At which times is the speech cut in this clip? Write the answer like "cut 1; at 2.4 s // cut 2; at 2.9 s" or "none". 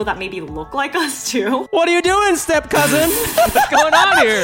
cut 1; at 1.7 s